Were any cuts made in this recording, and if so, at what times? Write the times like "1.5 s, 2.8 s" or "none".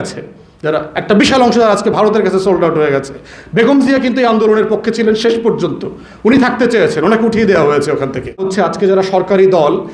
8.5 s